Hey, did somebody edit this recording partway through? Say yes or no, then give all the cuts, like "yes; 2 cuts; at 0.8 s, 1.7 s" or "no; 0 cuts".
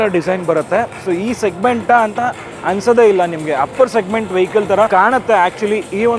yes; 1 cut; at 4.9 s